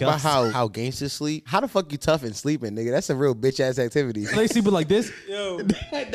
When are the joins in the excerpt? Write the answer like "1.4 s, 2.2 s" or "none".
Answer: 0.9 s, 4.3 s